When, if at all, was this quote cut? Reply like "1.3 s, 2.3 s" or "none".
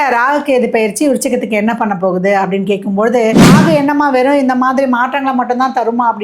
3.5 s